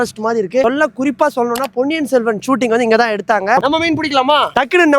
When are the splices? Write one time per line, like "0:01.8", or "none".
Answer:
0:03.6